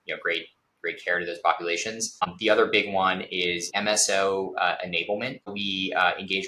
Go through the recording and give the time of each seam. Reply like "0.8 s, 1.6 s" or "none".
2.1 s, 3.7 s, 5.5 s